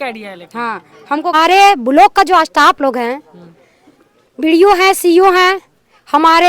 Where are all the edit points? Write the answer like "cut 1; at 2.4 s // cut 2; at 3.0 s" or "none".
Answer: cut 1; at 1.3 s